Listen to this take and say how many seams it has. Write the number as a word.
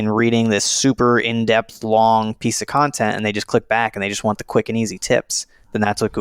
zero